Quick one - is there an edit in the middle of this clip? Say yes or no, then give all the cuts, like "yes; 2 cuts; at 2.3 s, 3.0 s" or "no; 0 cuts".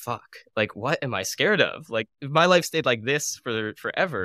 yes; 2 cuts; at 0.8 s, 2.1 s